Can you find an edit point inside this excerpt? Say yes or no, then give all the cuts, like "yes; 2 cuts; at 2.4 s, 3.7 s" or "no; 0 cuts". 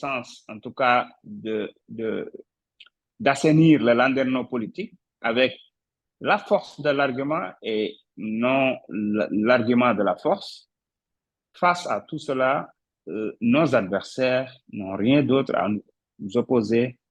no; 0 cuts